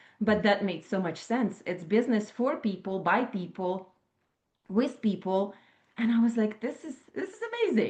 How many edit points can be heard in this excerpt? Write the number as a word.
zero